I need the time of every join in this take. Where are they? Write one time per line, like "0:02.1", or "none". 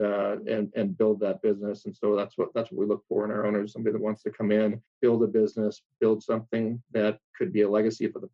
0:04.9
0:07.3